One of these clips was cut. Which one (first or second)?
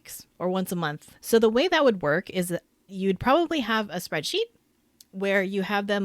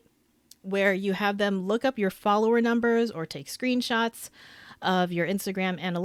first